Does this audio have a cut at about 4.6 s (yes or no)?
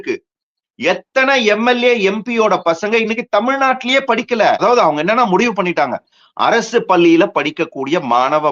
yes